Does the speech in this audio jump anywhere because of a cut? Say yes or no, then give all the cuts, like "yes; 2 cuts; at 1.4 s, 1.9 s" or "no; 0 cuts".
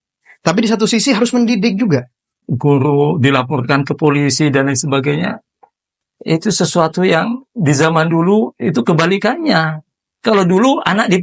yes; 1 cut; at 2.4 s